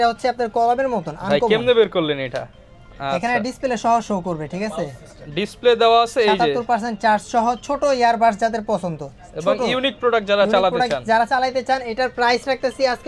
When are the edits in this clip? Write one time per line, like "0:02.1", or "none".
none